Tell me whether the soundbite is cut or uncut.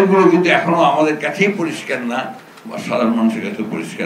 uncut